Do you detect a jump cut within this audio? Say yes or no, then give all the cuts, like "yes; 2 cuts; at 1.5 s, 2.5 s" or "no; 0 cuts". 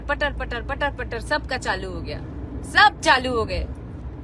no; 0 cuts